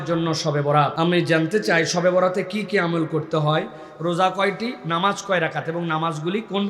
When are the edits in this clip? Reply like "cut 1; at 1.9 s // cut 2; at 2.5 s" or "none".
cut 1; at 0.9 s